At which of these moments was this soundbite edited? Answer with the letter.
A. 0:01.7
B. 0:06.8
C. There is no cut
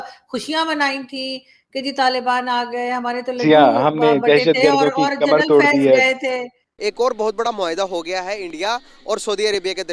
B